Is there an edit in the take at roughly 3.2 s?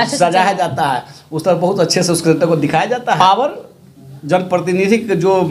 yes; 1 cut; at 3.2 s

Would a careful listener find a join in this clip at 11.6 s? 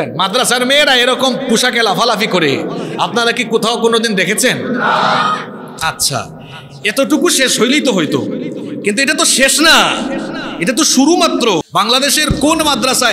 yes; 1 cut; at 11.6 s

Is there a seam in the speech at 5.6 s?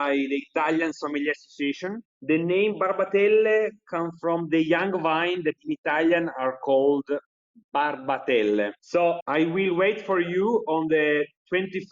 yes; 1 cut; at 5.6 s

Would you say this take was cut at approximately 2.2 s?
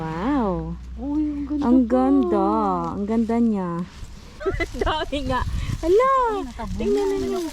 no; 1 cut; at 4.4 s

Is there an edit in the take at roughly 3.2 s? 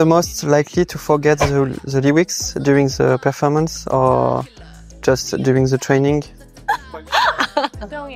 no; 1 cut; at 6.7 s

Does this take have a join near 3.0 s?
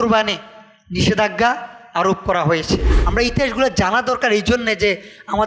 yes; 1 cut; at 3.0 s

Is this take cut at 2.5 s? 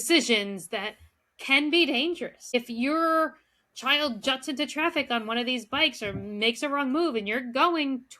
yes; 1 cut; at 2.5 s

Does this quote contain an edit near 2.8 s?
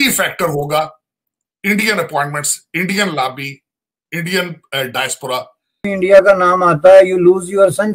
no; 1 cut; at 5.9 s

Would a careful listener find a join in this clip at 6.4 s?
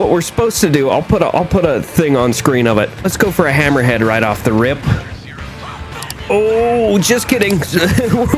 no; 1 cut; at 2.9 s

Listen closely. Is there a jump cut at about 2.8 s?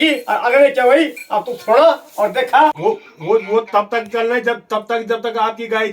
yes; 1 cut; at 2.8 s

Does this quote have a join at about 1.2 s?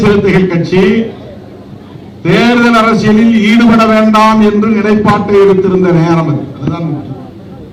no; 0 cuts

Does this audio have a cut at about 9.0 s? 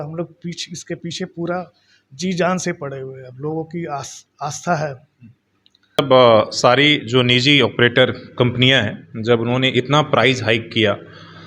no; 1 cut; at 6.0 s

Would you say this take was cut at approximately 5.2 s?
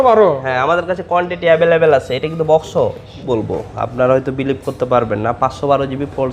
no; 1 cut; at 3.1 s

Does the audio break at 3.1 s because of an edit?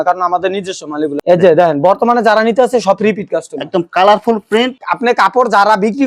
no; 2 cuts; at 1.2 s, 4.7 s

